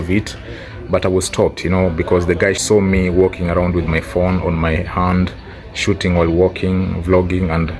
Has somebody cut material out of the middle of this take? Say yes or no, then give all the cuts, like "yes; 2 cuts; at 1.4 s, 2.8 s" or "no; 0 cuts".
yes; 1 cut; at 2.6 s